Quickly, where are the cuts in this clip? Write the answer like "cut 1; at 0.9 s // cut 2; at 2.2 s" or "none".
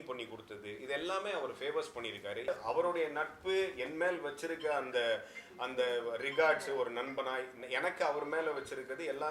cut 1; at 2.5 s

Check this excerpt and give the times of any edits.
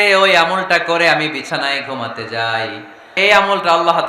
cut 1; at 3.2 s

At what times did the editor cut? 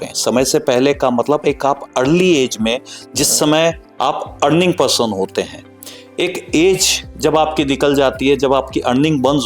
none

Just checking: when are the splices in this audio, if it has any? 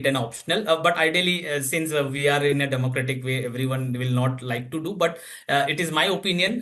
none

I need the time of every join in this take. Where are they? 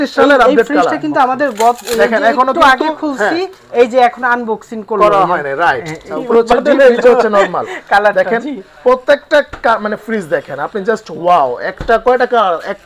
cut 1; at 6.1 s

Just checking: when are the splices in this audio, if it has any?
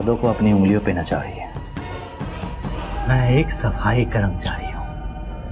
cut 1; at 2.9 s

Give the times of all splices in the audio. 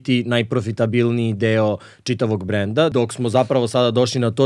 cut 1; at 2.9 s

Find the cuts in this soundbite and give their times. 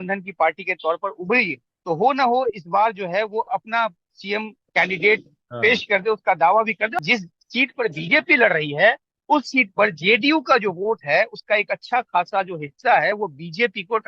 cut 1; at 1.7 s // cut 2; at 7.0 s

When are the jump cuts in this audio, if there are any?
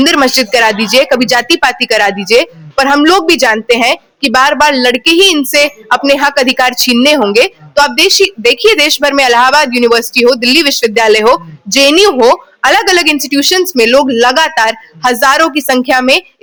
none

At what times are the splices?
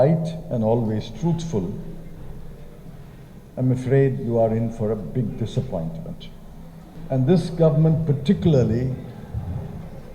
cut 1; at 6.9 s

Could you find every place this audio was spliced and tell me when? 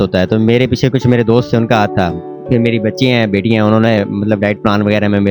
none

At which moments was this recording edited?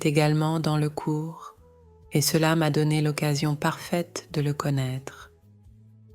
cut 1; at 5.2 s

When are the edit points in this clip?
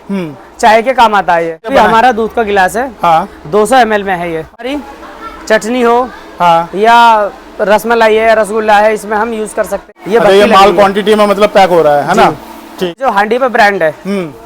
cut 1; at 1.7 s // cut 2; at 4.7 s // cut 3; at 9.8 s // cut 4; at 13.0 s

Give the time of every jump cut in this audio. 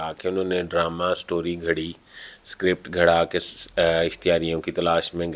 none

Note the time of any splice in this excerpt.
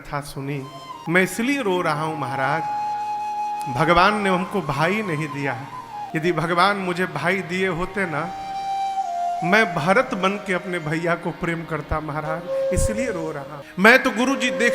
cut 1; at 1.0 s // cut 2; at 6.0 s // cut 3; at 13.5 s

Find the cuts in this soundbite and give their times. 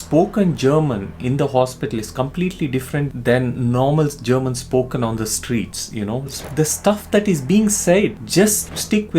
cut 1; at 6.5 s // cut 2; at 8.2 s

